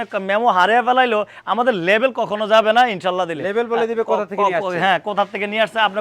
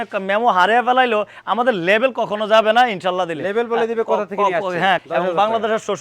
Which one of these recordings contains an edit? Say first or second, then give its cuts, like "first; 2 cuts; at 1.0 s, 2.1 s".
second; 1 cut; at 5.0 s